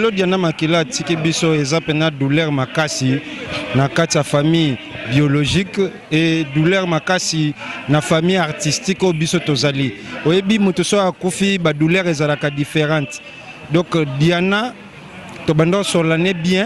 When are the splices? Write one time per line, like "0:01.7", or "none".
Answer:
none